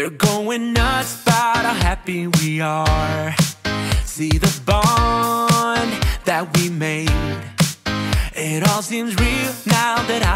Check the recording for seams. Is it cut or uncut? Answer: uncut